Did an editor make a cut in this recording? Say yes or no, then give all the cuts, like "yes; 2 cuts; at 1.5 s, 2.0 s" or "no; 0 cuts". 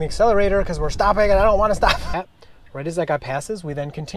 yes; 1 cut; at 2.0 s